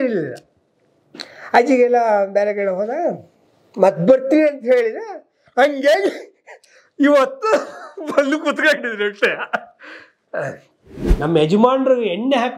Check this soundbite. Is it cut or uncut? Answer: cut